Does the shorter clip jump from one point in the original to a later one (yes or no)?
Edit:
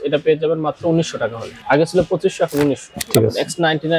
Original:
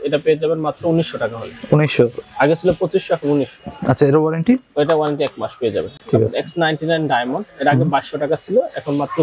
yes